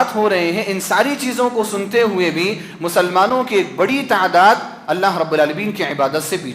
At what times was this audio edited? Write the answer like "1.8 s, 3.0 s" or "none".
none